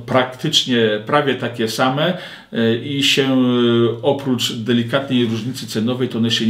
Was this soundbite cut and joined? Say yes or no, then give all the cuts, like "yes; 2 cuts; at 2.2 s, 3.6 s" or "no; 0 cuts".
no; 0 cuts